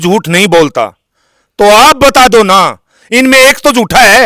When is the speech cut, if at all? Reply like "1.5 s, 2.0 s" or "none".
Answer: none

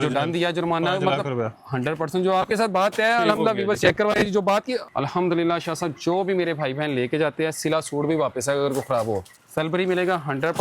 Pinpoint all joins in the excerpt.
4.9 s, 9.4 s

